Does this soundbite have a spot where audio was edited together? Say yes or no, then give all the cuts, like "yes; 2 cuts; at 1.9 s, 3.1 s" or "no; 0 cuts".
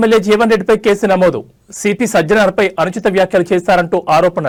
no; 0 cuts